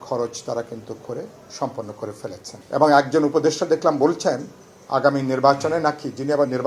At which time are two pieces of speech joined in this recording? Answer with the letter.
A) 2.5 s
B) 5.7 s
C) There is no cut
A